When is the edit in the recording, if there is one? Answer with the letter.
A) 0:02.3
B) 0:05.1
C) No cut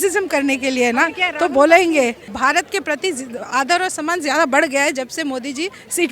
A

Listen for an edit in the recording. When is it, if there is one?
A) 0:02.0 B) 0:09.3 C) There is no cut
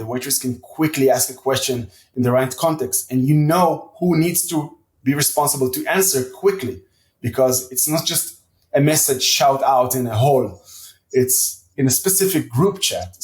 A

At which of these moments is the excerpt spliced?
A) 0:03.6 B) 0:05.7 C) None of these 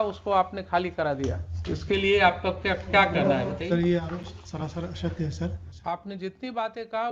B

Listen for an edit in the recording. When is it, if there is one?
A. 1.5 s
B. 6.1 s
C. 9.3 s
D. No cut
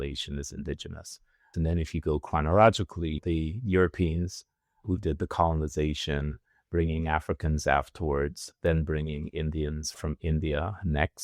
A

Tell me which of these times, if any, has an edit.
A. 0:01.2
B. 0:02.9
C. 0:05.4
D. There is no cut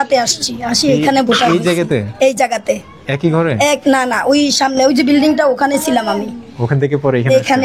D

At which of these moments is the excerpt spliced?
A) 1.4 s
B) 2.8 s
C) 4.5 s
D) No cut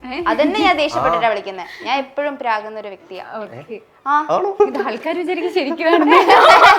C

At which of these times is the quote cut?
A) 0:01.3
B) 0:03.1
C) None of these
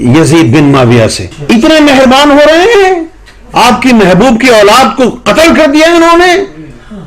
A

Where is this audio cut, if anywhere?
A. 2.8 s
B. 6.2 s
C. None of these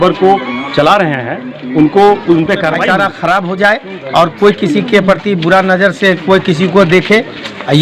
A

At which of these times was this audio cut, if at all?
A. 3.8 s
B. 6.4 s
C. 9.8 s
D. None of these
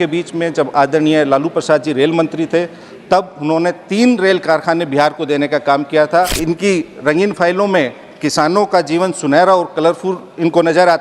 B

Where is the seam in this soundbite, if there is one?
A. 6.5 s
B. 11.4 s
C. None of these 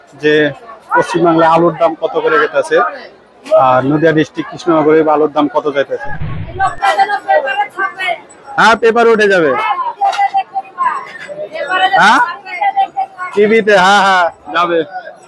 A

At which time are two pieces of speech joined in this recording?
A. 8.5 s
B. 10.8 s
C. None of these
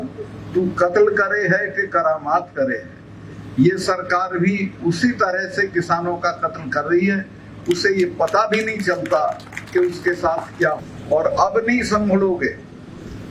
B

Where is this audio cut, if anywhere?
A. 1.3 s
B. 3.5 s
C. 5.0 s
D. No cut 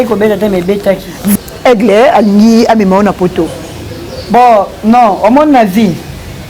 A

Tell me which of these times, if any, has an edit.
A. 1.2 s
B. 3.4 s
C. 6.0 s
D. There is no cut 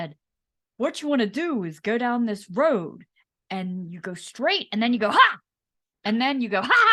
D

